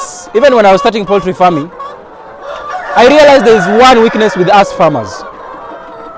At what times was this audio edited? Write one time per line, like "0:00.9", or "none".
none